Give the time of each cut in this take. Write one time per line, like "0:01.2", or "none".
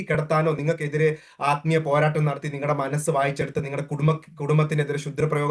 none